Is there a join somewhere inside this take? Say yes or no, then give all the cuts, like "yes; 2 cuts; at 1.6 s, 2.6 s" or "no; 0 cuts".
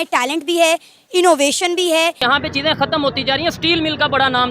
yes; 1 cut; at 2.2 s